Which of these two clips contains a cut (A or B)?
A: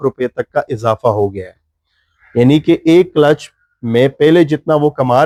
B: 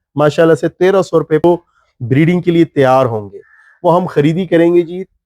B